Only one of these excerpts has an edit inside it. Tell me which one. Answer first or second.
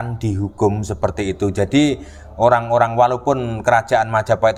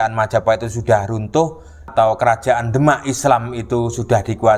second